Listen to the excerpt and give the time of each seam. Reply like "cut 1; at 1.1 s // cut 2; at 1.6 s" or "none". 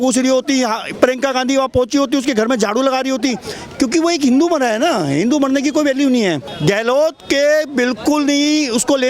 cut 1; at 6.5 s